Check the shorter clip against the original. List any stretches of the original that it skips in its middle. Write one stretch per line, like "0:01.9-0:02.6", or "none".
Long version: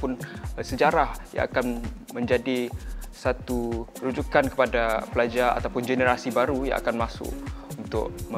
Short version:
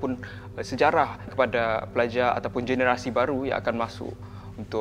0:01.3-0:04.5